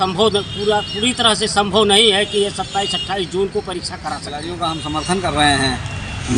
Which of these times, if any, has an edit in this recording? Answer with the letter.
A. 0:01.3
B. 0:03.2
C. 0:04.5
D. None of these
C